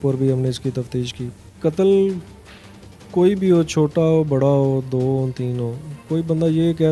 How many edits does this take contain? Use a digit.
1